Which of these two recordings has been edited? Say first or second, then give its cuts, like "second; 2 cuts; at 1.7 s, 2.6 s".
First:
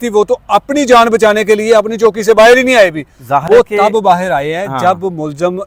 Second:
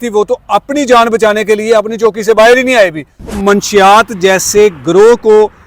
second; 1 cut; at 3.3 s